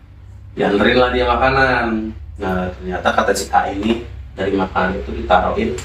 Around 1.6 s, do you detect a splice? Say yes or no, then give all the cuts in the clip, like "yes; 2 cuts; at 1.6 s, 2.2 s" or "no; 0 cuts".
no; 0 cuts